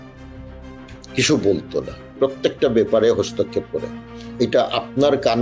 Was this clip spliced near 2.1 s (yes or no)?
yes